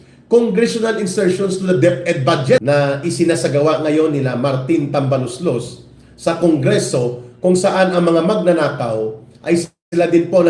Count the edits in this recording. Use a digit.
1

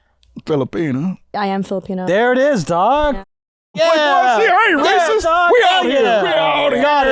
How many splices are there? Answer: 1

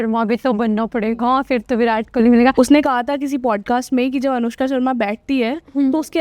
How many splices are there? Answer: 1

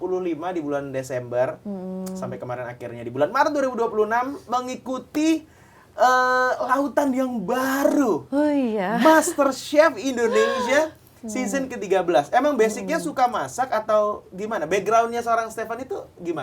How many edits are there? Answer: 0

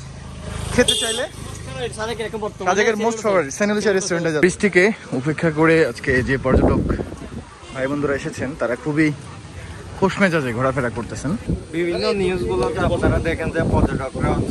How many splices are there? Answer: 2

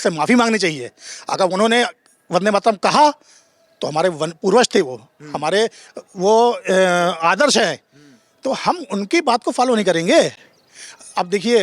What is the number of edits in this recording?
0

